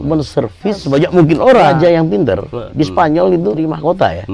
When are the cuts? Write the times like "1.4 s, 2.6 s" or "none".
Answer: 0.8 s, 1.7 s, 2.7 s, 3.6 s

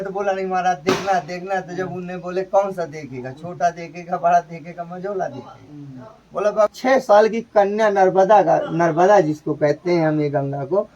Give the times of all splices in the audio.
6.7 s

